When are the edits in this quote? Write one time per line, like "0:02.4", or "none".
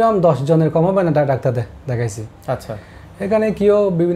none